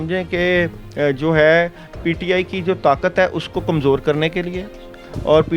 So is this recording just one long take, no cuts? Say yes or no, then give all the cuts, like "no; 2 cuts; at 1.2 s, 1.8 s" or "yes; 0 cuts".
yes; 0 cuts